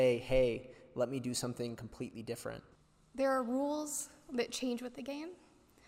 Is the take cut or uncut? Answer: cut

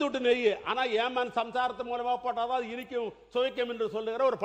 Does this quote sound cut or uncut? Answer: uncut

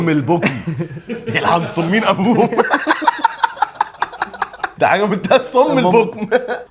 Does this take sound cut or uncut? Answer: cut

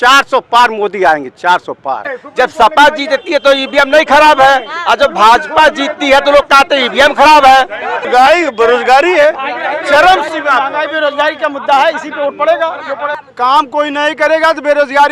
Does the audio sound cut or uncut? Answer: cut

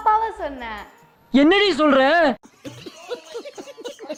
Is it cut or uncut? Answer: uncut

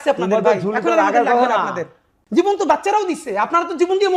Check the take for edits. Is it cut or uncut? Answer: cut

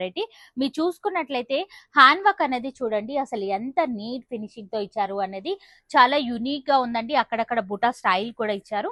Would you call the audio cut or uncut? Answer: uncut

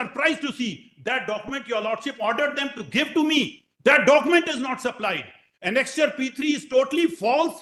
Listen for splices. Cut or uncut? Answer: uncut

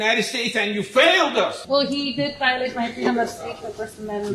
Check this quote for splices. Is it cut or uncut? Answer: cut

